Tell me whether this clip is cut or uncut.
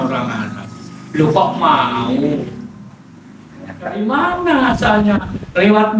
cut